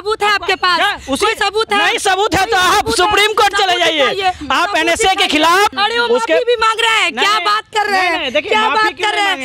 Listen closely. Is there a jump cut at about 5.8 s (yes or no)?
yes